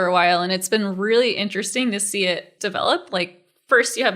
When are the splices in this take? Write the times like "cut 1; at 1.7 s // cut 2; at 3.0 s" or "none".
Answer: cut 1; at 2.5 s